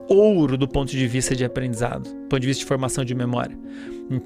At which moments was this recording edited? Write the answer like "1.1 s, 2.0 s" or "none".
none